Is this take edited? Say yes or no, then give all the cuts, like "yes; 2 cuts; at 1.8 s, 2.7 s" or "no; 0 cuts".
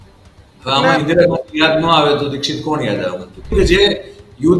yes; 1 cut; at 3.5 s